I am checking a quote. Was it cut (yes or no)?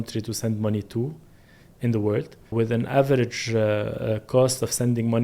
yes